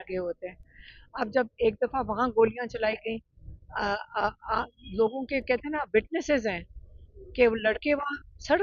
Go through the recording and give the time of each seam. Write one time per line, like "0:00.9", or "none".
none